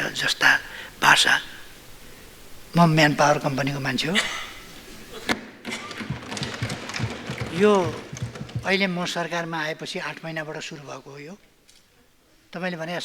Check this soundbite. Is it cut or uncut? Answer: uncut